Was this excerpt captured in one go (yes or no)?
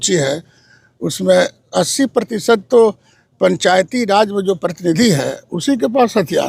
yes